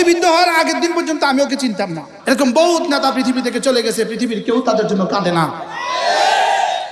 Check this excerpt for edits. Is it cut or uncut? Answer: cut